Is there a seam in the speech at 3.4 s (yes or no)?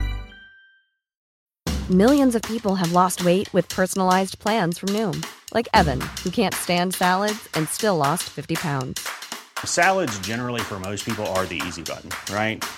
no